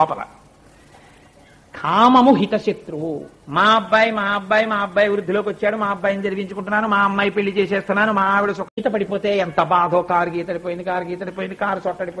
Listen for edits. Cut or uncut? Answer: cut